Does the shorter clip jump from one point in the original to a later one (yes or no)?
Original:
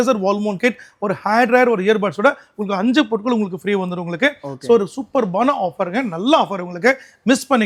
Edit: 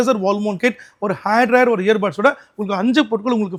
no